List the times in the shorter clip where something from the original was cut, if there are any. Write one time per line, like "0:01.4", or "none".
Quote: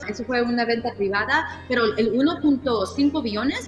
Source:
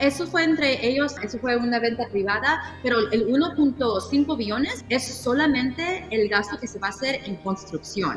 none